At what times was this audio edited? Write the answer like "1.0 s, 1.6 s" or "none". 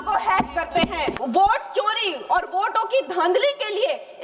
1.2 s